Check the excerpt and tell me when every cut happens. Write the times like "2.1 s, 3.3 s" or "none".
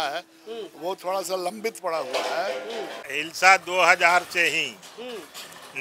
3.1 s